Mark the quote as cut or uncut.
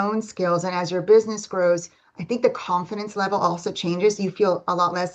uncut